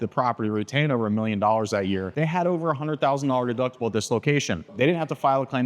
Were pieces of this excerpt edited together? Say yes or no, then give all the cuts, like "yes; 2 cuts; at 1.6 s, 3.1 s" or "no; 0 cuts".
yes; 2 cuts; at 2.1 s, 4.7 s